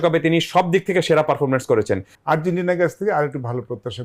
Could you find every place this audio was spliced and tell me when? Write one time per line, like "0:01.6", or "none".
0:02.1